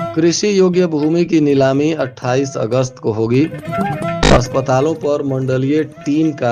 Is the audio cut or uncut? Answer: uncut